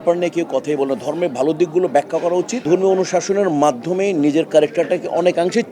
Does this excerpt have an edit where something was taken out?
yes; 1 cut; at 2.6 s

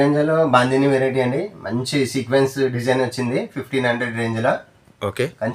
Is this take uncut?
yes; 0 cuts

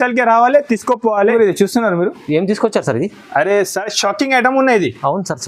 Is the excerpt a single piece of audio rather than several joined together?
no; 1 cut; at 1.3 s

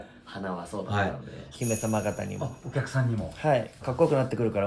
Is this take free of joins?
no; 2 cuts; at 1.5 s, 3.9 s

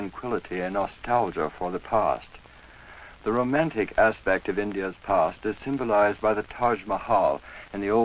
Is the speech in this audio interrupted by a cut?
yes; 1 cut; at 3.6 s

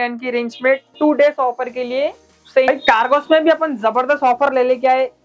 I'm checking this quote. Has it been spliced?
yes; 1 cut; at 2.7 s

